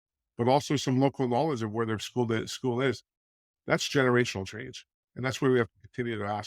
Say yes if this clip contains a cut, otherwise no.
no